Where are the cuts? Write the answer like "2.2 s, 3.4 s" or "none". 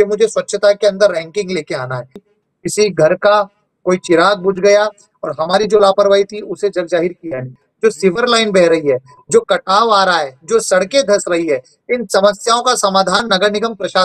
2.3 s, 7.6 s